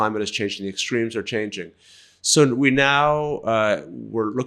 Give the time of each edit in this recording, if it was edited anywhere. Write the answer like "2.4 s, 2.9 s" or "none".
none